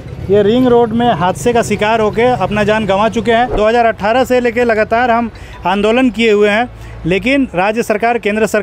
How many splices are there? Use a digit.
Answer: 1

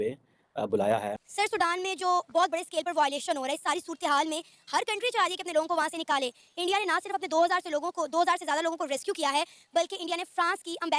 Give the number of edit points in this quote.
1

